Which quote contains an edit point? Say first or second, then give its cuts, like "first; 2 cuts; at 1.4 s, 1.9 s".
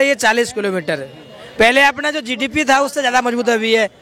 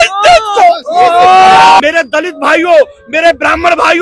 second; 1 cut; at 1.8 s